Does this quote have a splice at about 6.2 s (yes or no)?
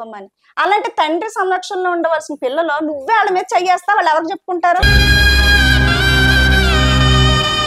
no